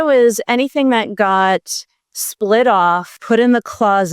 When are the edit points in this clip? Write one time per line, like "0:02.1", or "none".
0:03.1